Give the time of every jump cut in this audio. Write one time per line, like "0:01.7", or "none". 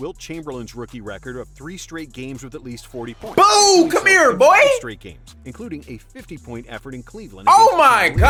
none